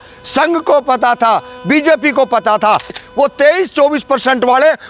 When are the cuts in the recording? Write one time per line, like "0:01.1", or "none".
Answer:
0:03.0